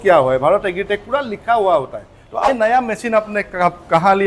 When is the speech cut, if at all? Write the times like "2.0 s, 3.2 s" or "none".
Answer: 2.5 s